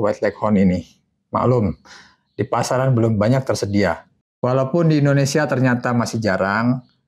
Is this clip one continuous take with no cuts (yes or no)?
no